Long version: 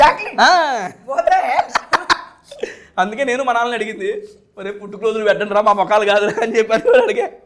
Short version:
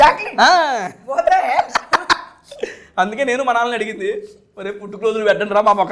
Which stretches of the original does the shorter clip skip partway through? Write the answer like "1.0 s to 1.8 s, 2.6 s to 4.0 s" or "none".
none